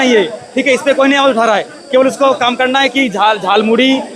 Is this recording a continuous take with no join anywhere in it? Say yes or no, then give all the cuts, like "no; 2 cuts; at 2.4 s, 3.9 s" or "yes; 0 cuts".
yes; 0 cuts